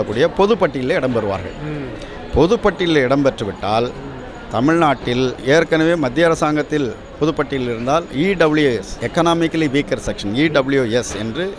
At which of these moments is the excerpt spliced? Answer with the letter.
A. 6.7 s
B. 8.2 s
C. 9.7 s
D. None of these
D